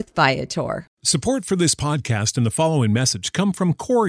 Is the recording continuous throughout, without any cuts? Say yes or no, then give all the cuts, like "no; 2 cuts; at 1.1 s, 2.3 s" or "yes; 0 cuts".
no; 1 cut; at 0.9 s